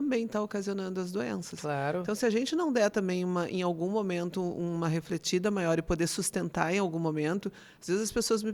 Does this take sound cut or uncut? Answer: uncut